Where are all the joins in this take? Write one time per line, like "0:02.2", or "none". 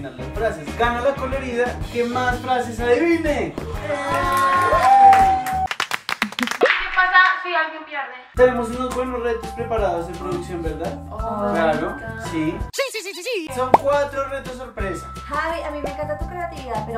none